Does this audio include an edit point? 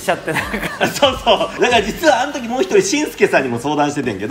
yes; 1 cut; at 1.6 s

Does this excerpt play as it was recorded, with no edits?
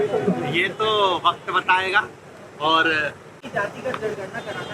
no; 1 cut; at 3.4 s

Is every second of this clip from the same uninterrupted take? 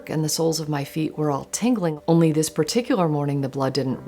no; 1 cut; at 1.9 s

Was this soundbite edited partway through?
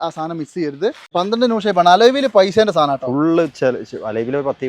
yes; 1 cut; at 1.0 s

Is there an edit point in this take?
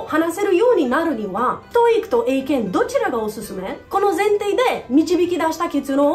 no; 0 cuts

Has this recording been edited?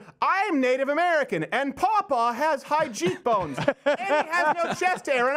no; 0 cuts

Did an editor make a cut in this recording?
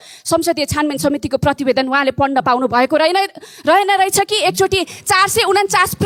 no; 0 cuts

